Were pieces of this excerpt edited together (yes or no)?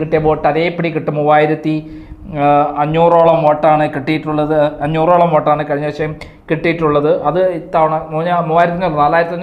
no